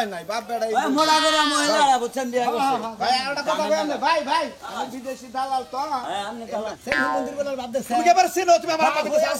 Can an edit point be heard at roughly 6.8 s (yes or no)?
yes